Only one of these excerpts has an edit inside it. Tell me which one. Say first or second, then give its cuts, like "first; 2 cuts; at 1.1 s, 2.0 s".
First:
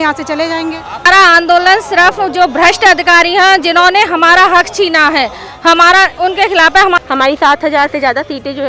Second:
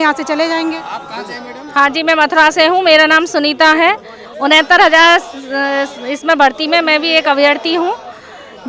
first; 2 cuts; at 1.0 s, 7.0 s